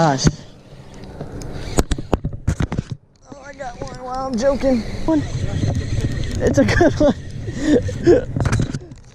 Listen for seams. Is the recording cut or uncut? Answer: cut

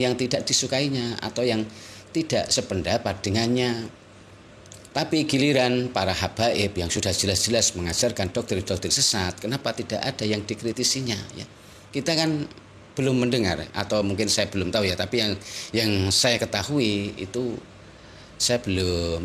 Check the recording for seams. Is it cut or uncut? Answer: uncut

